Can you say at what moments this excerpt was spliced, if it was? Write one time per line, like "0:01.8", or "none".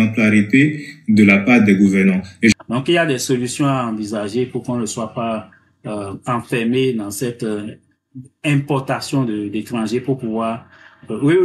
0:02.6

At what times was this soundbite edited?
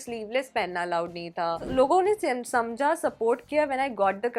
0:01.7

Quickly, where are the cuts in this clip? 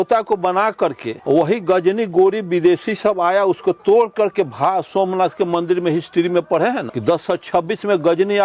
0:01.1
0:06.9

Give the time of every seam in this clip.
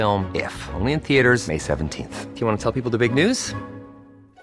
none

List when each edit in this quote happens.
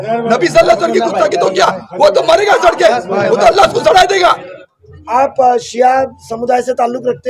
0:04.6

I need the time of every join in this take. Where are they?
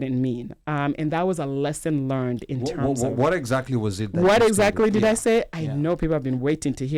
none

